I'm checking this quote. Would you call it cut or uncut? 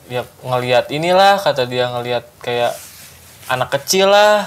uncut